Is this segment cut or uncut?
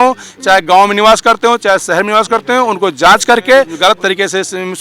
cut